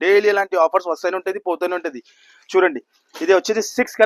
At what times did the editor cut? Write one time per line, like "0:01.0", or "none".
none